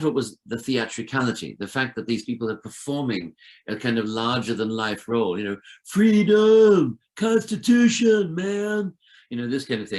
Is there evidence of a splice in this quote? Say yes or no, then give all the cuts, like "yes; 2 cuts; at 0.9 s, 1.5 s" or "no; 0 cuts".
no; 0 cuts